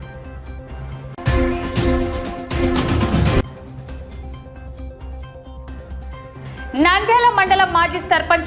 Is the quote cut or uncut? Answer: uncut